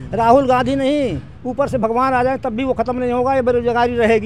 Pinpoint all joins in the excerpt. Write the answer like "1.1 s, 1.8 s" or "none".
none

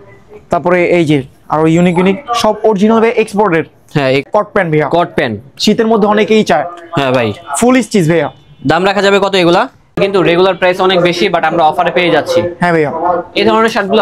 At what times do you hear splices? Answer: 4.2 s, 10.0 s

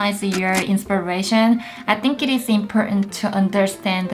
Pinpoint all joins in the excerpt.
none

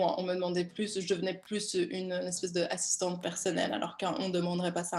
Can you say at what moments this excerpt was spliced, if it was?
none

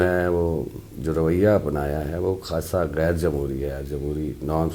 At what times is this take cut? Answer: none

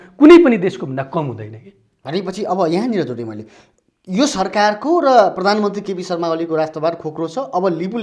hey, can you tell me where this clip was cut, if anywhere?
none

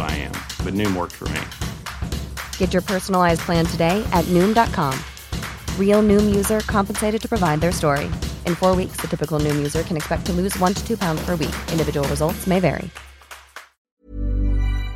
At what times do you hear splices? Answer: 14.1 s

